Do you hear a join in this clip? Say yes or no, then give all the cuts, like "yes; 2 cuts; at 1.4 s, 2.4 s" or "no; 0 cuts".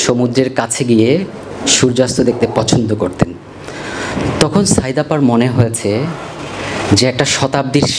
no; 0 cuts